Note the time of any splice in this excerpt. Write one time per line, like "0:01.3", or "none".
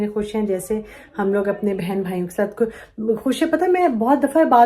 none